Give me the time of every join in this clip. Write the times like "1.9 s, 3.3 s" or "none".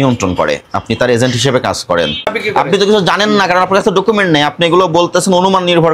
2.3 s